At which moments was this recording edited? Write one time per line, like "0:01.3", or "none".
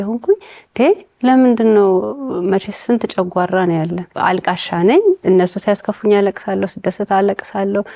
0:04.1